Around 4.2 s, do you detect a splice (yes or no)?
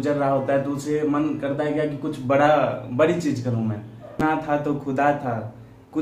yes